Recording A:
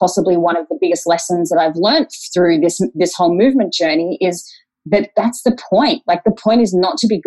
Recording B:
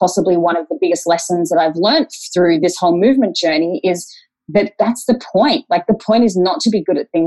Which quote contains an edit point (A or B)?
B